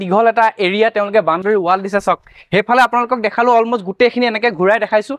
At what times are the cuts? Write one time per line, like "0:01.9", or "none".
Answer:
none